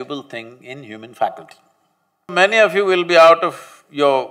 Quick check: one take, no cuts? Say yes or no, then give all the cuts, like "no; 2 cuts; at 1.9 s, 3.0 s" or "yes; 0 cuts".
no; 1 cut; at 2.3 s